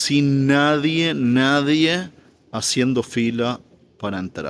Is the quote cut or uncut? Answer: uncut